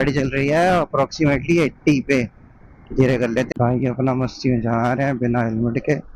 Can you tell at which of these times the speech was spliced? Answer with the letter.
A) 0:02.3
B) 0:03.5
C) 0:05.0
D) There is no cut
B